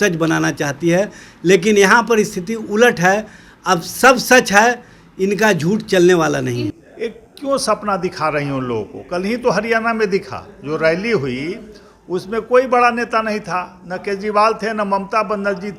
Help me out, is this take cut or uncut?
cut